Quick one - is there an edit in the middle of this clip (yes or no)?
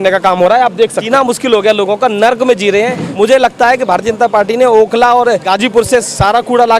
yes